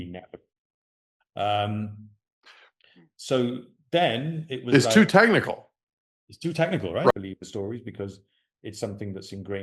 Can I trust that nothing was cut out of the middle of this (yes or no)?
no